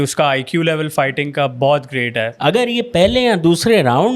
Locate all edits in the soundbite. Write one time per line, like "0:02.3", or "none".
0:02.3